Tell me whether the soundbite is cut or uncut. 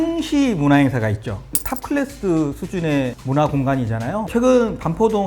cut